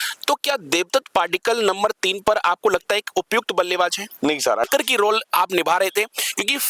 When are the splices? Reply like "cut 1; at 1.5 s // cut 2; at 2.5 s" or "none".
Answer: cut 1; at 4.7 s